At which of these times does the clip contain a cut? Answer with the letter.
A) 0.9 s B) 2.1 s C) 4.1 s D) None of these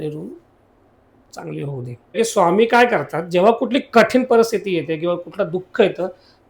B